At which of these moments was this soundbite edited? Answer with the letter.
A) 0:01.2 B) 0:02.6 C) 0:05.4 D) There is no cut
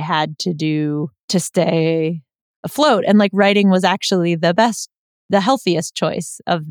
A